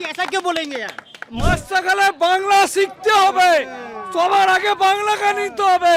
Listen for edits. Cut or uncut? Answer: cut